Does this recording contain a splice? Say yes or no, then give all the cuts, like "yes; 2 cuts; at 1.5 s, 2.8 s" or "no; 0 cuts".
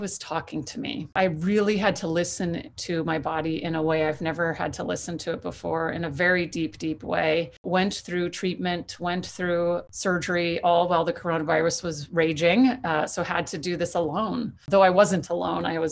yes; 4 cuts; at 1.1 s, 7.6 s, 9.8 s, 14.6 s